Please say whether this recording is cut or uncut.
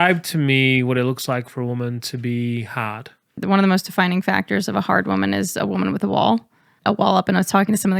cut